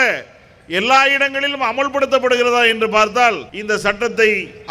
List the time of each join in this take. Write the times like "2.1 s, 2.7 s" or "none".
3.5 s